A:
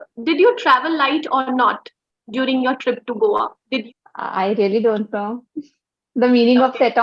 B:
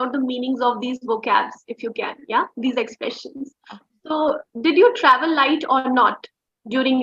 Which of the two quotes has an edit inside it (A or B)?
A